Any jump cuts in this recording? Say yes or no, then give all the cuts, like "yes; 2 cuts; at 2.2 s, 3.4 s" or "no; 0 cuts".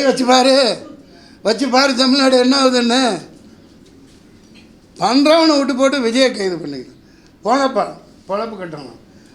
no; 0 cuts